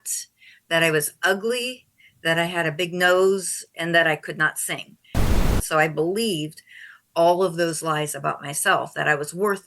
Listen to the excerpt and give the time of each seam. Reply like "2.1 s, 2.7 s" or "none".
5.4 s

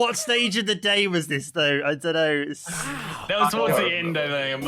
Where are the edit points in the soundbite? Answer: none

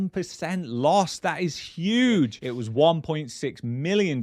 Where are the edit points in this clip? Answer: 2.4 s

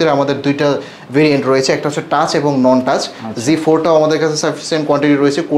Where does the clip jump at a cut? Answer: none

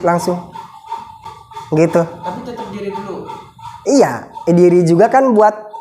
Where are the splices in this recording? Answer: 1.1 s

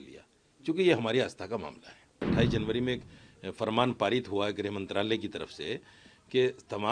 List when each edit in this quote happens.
2.2 s

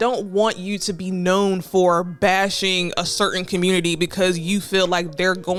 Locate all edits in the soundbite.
none

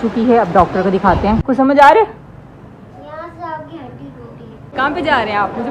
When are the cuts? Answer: 1.4 s, 4.7 s

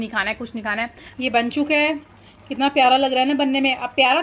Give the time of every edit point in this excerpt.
1.2 s

